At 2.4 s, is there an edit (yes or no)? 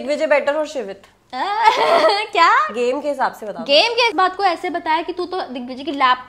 no